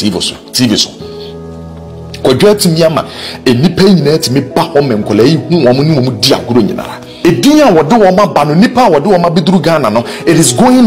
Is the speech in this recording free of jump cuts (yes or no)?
no